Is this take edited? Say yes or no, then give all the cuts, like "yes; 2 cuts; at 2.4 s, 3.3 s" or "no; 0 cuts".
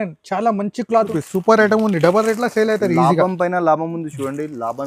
yes; 1 cut; at 1.1 s